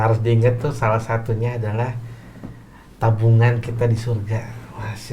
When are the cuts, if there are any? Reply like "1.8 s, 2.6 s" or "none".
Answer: none